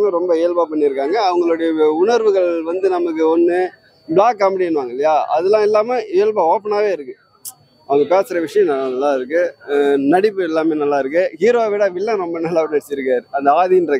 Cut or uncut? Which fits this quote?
uncut